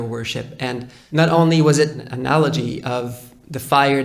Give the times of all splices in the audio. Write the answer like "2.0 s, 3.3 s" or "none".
1.0 s, 2.0 s